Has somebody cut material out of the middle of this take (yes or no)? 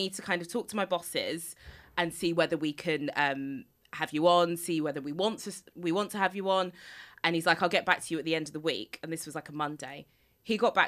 no